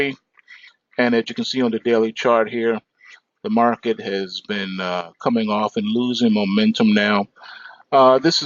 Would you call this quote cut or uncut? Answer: cut